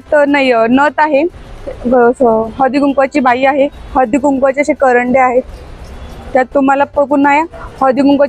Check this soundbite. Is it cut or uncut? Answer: uncut